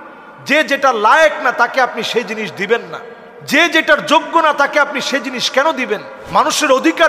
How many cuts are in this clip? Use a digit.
1